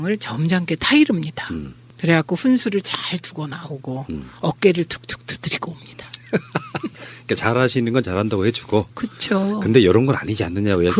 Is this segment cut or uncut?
cut